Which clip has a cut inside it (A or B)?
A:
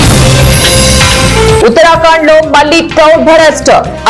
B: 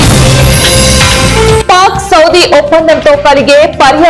B